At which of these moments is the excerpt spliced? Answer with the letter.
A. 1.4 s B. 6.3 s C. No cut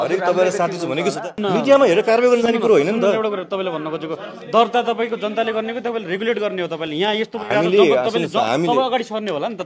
A